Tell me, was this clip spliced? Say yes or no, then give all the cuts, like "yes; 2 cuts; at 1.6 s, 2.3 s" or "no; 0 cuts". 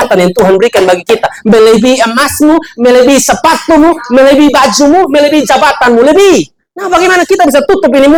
no; 0 cuts